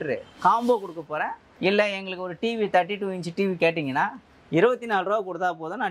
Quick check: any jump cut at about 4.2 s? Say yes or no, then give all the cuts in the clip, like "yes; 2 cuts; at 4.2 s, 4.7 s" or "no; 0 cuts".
no; 1 cut; at 1.4 s